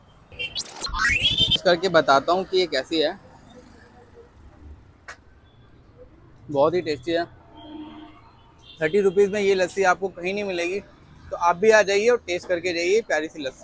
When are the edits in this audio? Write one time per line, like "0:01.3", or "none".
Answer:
0:01.6

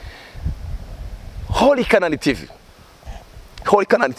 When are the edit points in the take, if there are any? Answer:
none

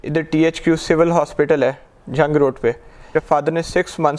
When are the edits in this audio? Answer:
0:03.1

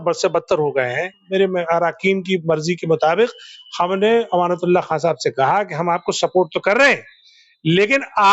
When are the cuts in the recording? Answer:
0:01.2

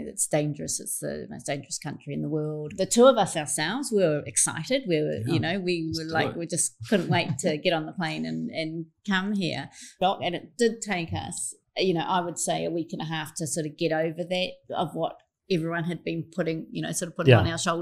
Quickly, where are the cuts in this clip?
0:02.6
0:09.9

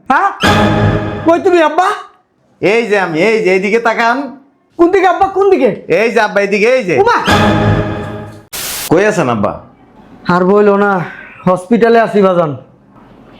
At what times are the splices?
0:08.9

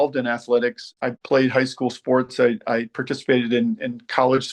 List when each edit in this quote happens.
0:01.0

